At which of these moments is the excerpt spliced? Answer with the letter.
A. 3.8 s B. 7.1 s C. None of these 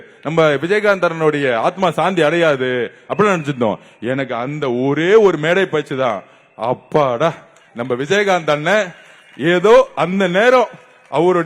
C